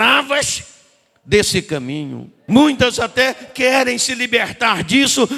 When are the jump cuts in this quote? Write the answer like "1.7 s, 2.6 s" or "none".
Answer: 2.3 s